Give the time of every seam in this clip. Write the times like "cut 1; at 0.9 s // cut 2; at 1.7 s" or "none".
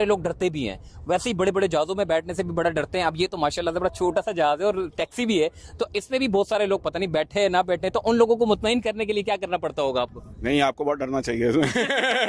none